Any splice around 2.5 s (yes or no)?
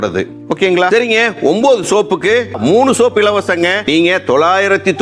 yes